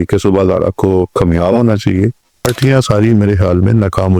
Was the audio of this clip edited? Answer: yes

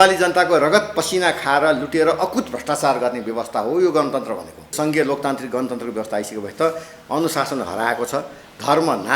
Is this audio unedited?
no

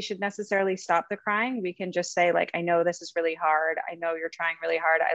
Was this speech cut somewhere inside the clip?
no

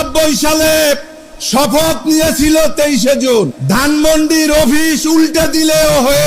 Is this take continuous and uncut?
no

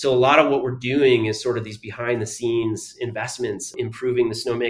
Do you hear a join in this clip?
no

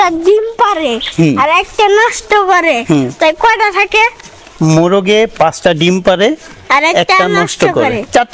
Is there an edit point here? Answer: no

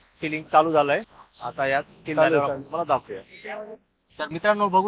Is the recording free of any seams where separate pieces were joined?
yes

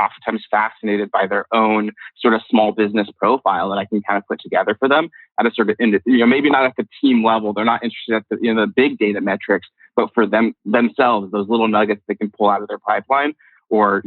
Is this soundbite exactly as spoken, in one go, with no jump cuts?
yes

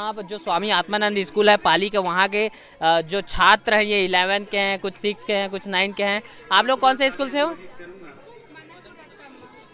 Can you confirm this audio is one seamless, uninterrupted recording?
yes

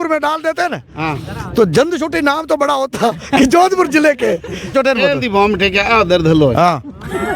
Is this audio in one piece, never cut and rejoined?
no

